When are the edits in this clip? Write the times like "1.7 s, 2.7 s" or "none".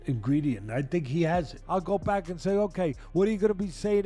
1.6 s